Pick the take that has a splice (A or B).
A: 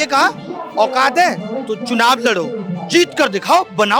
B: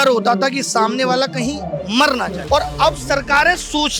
B